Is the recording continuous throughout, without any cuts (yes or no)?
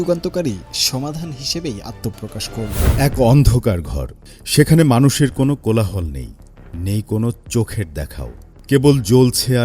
no